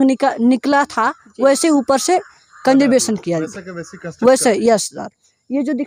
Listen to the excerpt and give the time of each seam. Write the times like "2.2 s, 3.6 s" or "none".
none